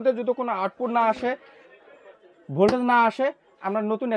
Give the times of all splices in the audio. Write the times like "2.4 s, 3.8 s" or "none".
none